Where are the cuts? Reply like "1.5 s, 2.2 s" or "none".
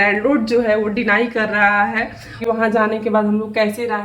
2.4 s